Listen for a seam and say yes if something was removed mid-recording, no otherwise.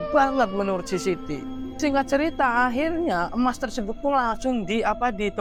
no